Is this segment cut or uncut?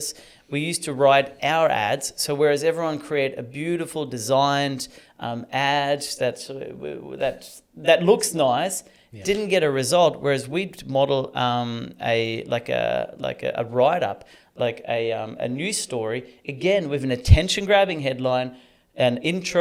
uncut